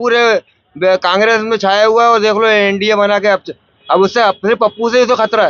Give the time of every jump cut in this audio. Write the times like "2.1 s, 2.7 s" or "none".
none